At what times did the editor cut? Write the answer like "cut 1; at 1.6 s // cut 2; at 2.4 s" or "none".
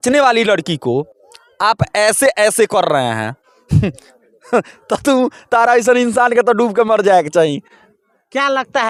none